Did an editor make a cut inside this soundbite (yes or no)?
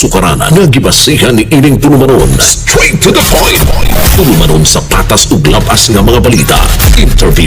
no